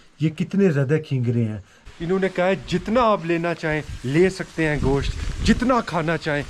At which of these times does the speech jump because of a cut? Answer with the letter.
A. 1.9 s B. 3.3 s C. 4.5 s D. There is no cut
A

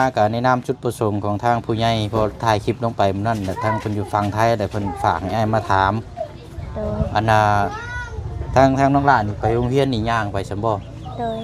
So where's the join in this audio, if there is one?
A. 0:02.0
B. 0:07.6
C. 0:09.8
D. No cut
D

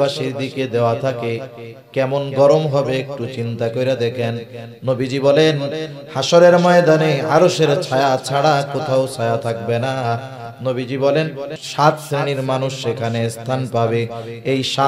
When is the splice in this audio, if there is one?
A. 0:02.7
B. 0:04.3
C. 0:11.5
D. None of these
C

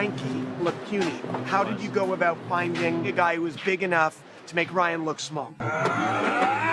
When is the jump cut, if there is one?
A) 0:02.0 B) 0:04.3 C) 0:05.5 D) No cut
C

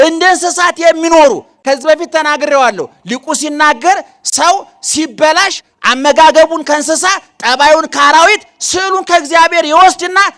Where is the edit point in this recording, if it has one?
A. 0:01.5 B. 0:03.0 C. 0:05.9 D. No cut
D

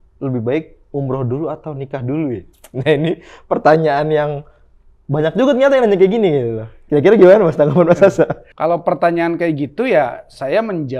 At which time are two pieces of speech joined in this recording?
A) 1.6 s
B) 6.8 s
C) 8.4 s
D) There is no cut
C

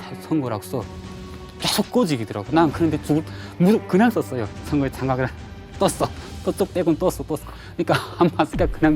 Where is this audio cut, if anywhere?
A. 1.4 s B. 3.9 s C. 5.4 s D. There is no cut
D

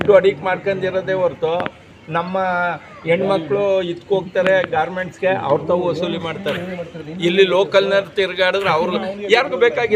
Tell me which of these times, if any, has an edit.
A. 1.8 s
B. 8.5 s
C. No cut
C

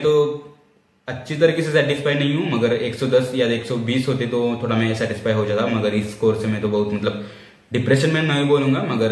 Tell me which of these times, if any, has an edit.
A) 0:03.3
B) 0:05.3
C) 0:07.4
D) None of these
D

